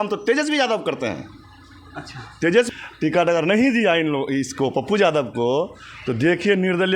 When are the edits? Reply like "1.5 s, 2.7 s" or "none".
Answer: 2.7 s